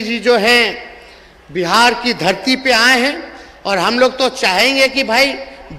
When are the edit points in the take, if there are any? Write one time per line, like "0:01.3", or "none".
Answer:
none